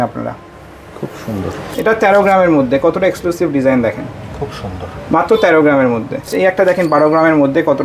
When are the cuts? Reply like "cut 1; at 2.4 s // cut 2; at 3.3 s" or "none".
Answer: cut 1; at 1.6 s // cut 2; at 6.3 s